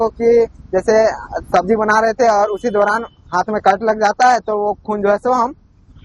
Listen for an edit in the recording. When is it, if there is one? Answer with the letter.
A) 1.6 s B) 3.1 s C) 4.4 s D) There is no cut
D